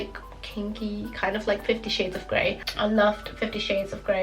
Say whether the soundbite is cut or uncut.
uncut